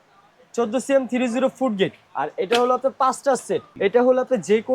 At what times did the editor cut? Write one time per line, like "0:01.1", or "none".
0:02.0
0:03.7